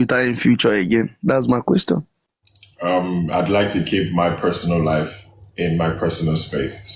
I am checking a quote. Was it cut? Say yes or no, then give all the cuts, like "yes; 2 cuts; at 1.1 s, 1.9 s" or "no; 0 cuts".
no; 0 cuts